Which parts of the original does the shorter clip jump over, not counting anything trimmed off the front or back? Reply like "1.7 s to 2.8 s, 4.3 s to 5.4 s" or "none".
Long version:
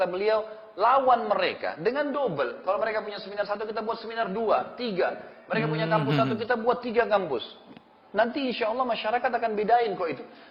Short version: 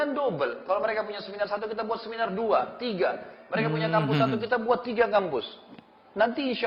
none